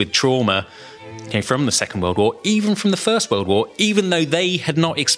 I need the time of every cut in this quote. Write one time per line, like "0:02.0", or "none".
0:01.3